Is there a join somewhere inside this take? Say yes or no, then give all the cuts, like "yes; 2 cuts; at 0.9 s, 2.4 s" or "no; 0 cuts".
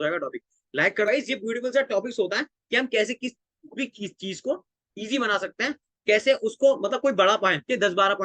yes; 1 cut; at 1.1 s